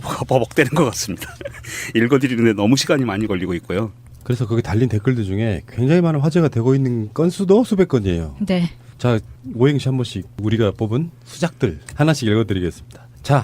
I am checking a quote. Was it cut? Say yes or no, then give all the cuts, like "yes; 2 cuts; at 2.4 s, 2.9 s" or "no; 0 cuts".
yes; 1 cut; at 11.5 s